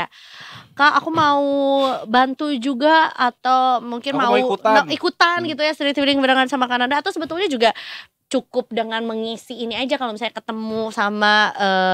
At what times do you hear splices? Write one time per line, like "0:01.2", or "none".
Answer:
none